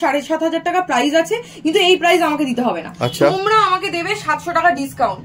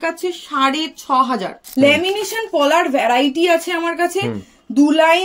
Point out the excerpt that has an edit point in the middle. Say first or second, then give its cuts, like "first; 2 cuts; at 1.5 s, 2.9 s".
second; 1 cut; at 1.6 s